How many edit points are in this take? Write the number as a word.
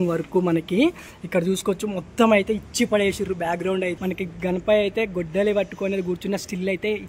one